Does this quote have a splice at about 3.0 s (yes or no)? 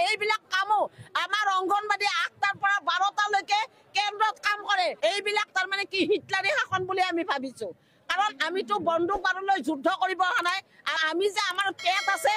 no